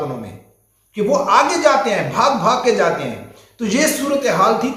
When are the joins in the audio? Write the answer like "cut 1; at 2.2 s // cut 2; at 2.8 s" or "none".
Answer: none

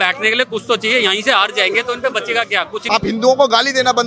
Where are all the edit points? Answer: cut 1; at 2.8 s

